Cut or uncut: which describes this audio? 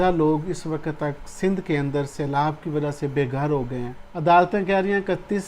cut